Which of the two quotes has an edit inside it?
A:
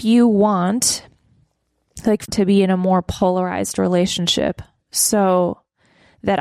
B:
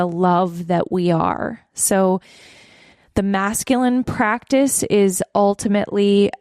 A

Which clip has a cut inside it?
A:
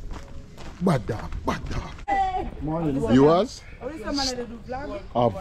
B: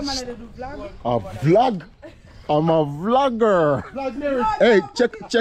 A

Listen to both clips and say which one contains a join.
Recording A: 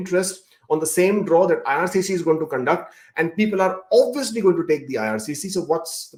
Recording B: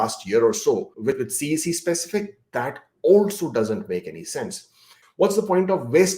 B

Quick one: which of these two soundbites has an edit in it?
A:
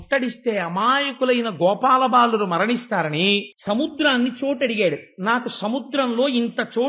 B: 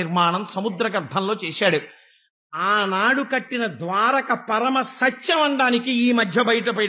A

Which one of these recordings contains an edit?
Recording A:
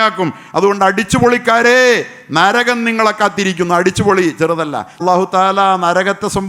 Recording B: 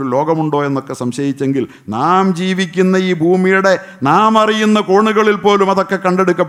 A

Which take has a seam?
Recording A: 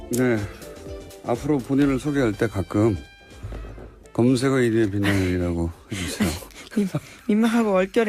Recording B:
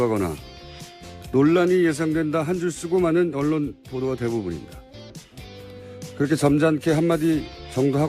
B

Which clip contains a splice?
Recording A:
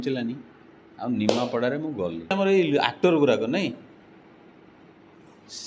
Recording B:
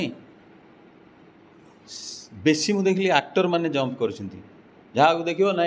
A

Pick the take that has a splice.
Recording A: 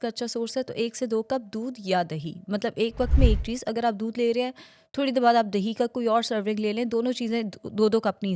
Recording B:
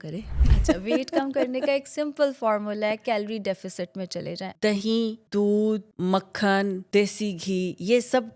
B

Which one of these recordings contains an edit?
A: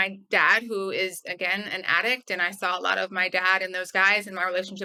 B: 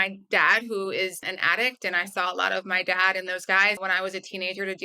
B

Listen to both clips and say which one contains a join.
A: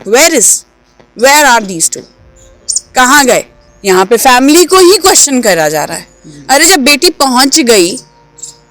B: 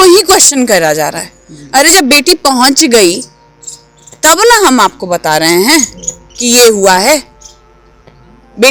A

